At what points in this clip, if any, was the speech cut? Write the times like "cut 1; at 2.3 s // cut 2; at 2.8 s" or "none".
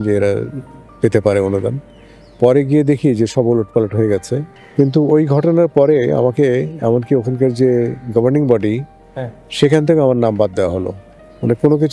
cut 1; at 4.6 s